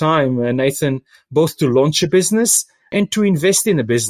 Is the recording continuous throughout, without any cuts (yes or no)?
no